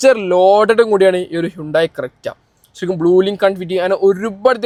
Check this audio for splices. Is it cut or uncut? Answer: uncut